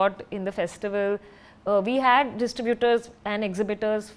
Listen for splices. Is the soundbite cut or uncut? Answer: uncut